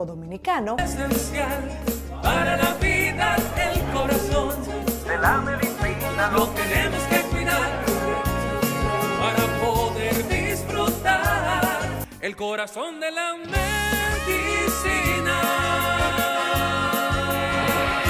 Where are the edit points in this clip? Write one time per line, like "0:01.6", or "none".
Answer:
0:12.0